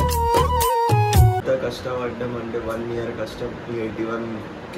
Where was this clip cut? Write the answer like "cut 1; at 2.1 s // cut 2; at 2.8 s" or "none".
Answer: cut 1; at 1.4 s